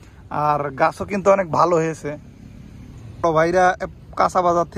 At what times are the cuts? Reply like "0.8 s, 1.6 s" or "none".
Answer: 3.2 s